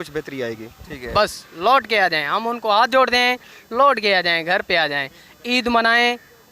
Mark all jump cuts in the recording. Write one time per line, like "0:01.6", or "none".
0:00.9

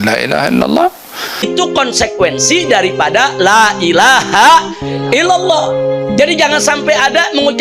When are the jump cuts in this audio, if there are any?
0:01.5

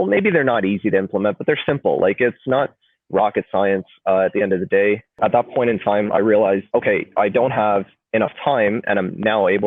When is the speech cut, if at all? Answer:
0:05.2
0:06.6

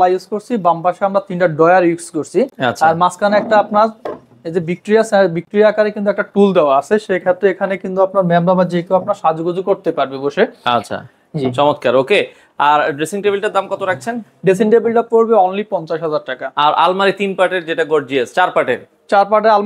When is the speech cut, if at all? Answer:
none

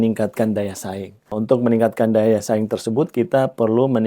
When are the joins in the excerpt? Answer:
0:01.3

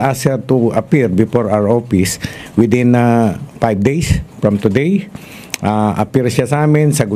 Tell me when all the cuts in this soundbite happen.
none

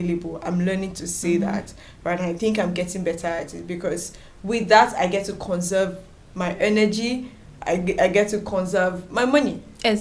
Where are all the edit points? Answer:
none

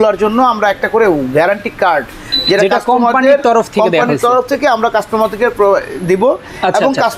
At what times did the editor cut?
none

